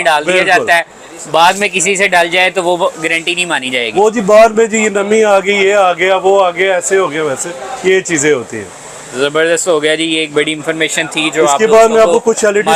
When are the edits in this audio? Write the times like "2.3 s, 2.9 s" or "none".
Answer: none